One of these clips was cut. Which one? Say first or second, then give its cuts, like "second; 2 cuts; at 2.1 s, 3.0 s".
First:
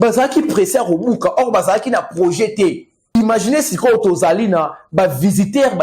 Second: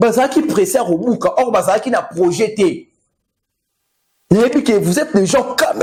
first; 1 cut; at 3.1 s